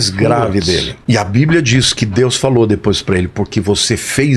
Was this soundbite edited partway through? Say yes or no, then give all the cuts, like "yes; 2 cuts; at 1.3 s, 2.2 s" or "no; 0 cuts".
yes; 1 cut; at 0.9 s